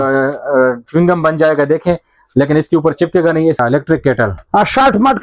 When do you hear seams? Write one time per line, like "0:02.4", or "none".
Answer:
0:03.6